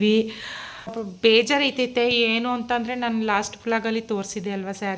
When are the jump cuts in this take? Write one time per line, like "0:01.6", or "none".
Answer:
0:01.0